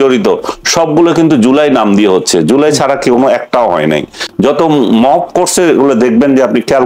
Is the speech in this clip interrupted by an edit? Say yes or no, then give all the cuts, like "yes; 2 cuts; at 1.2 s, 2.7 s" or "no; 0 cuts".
no; 0 cuts